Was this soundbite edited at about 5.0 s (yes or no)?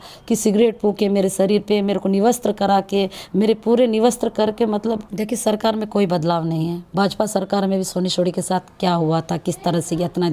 yes